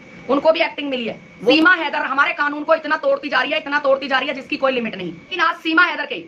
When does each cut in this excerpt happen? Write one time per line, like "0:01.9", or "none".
0:01.5
0:05.3